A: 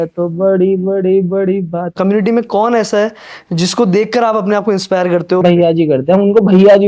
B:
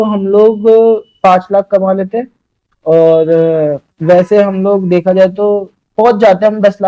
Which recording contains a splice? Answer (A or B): A